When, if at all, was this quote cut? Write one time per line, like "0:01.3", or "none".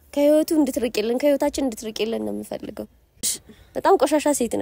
0:03.2